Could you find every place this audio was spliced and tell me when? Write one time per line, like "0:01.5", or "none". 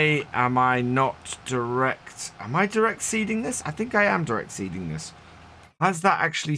none